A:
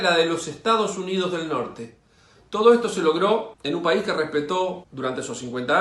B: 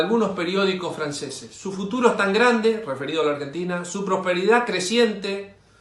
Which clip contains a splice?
A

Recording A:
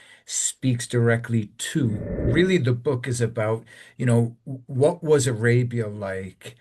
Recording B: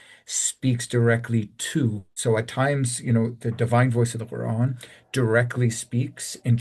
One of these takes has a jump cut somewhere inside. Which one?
A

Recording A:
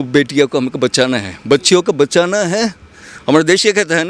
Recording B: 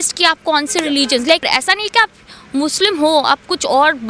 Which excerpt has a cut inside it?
B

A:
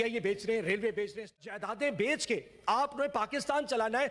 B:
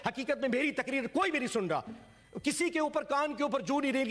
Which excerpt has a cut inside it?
A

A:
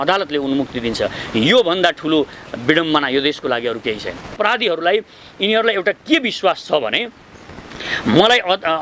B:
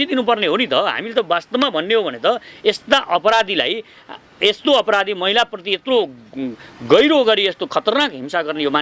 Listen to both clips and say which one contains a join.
A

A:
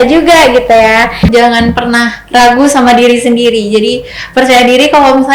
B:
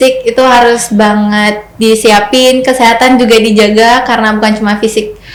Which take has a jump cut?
A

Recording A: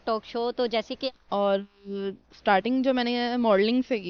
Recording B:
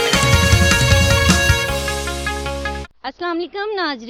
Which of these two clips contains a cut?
A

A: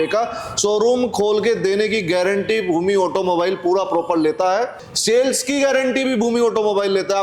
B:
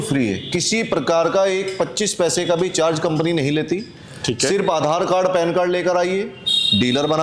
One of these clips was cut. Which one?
A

